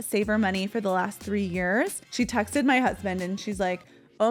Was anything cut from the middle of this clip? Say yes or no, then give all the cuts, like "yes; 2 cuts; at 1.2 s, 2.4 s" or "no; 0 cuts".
yes; 1 cut; at 2.0 s